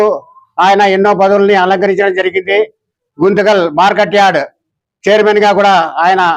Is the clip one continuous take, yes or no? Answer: yes